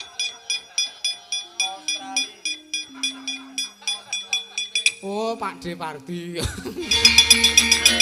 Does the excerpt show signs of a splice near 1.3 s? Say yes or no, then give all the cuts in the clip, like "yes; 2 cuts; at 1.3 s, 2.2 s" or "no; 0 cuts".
no; 1 cut; at 6.9 s